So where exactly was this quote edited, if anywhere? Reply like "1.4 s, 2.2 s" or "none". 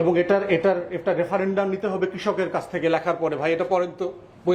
none